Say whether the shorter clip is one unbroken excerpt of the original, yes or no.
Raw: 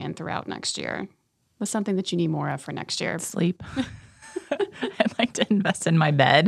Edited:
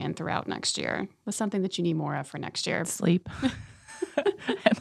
no